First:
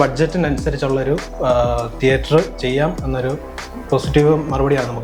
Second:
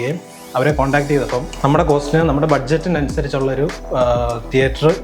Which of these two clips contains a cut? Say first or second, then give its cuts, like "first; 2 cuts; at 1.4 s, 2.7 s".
second; 1 cut; at 1.5 s